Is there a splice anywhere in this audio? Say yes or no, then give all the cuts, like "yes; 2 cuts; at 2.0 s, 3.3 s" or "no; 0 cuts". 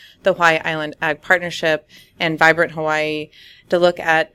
no; 0 cuts